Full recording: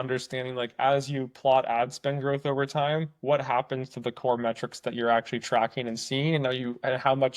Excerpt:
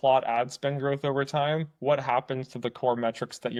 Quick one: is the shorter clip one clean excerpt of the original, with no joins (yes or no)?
yes